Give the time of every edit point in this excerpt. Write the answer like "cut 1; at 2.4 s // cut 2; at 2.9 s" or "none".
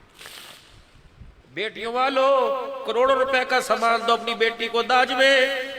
cut 1; at 1.4 s